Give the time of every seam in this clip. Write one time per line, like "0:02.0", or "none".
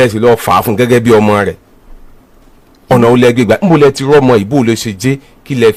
none